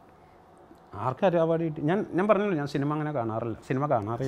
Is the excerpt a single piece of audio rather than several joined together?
yes; 0 cuts

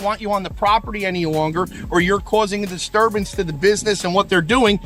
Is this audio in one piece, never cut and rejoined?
yes; 0 cuts

